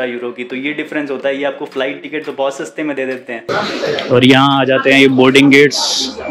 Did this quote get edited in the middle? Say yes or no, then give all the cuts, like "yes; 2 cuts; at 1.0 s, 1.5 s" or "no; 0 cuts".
yes; 1 cut; at 3.3 s